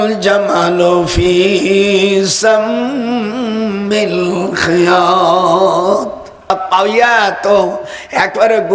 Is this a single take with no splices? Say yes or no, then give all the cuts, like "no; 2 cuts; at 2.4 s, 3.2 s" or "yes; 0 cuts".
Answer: no; 1 cut; at 6.5 s